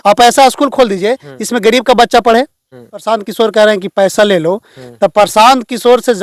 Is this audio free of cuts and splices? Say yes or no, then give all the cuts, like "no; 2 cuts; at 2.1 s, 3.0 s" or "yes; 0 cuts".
no; 1 cut; at 2.9 s